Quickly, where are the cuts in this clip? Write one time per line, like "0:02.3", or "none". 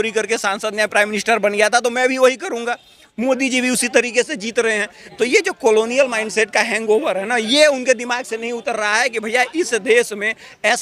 none